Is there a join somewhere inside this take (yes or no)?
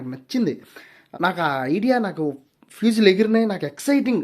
yes